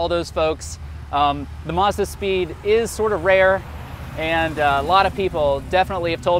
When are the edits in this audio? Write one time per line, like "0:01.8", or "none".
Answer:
none